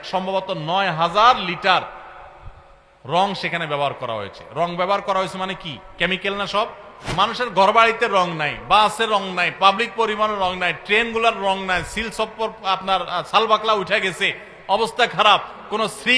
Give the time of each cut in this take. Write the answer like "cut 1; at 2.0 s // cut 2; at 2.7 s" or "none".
cut 1; at 7.0 s